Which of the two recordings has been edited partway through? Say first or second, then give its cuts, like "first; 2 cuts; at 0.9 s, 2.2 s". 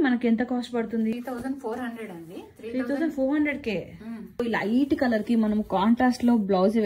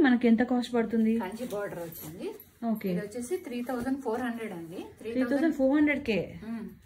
first; 2 cuts; at 1.1 s, 4.4 s